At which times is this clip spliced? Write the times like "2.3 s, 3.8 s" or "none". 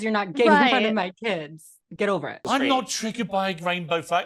2.4 s